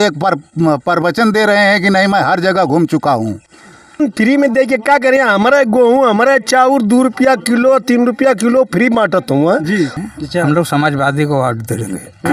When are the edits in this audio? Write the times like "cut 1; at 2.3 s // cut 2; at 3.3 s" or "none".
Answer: cut 1; at 3.8 s // cut 2; at 10.0 s